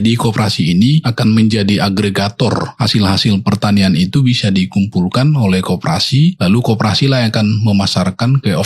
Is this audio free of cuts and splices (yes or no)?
no